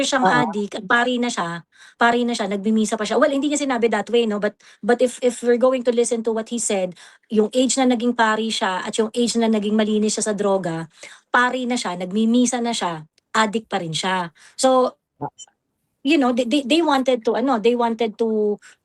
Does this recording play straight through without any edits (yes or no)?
yes